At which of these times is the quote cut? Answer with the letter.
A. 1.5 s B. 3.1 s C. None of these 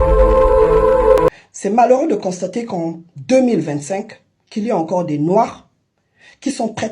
A